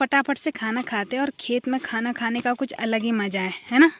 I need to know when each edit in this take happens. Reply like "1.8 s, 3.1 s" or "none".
none